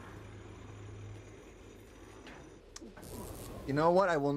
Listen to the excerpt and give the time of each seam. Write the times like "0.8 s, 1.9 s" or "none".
2.6 s